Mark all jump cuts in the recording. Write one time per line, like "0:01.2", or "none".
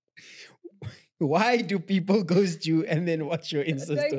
none